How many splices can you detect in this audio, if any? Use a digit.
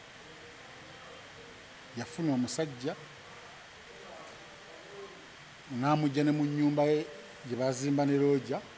0